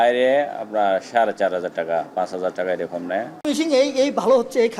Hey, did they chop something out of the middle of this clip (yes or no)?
yes